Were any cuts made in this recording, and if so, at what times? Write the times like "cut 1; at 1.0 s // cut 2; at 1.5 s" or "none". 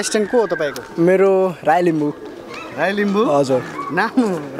none